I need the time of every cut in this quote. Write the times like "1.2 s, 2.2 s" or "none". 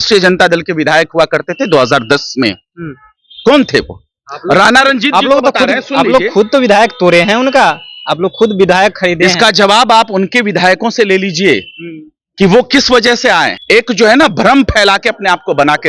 13.6 s